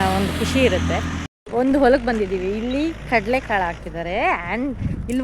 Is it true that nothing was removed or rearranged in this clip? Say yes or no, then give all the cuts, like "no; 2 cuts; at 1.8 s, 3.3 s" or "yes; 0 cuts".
no; 1 cut; at 1.3 s